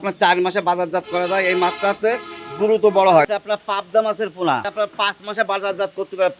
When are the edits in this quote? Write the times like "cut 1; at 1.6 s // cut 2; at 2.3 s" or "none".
cut 1; at 3.3 s // cut 2; at 4.7 s